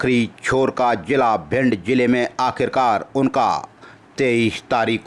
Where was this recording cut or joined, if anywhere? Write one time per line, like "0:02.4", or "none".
none